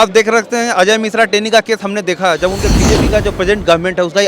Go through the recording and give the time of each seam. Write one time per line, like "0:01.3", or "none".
0:02.7